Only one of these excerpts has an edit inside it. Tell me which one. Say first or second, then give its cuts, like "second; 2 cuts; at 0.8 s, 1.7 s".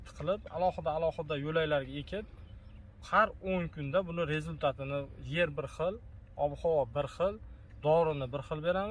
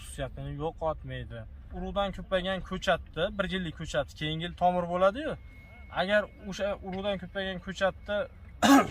second; 1 cut; at 1.7 s